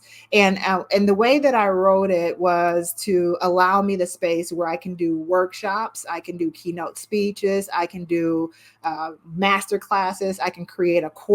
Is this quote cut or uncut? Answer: uncut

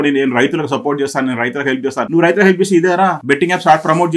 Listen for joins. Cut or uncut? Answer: cut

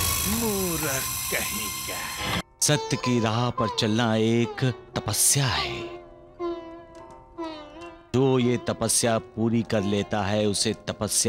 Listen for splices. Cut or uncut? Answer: cut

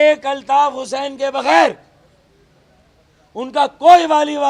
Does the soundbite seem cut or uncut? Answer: uncut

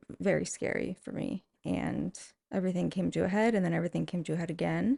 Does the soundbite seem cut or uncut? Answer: uncut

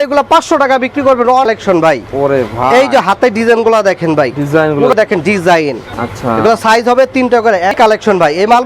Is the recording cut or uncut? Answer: cut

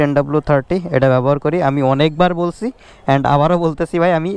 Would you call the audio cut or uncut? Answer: uncut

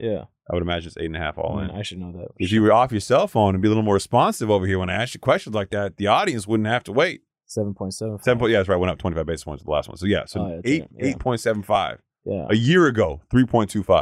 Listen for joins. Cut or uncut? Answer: uncut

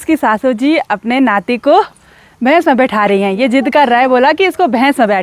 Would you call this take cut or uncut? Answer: uncut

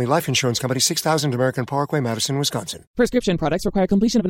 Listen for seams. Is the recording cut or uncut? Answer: cut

